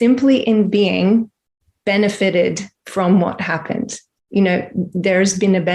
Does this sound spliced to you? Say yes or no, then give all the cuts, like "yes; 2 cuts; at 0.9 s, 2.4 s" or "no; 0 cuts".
no; 0 cuts